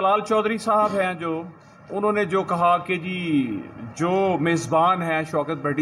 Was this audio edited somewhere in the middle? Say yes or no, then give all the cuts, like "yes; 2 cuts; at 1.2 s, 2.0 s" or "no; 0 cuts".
no; 0 cuts